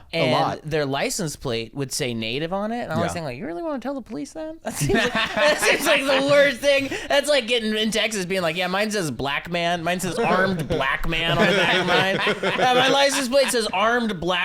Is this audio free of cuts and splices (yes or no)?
yes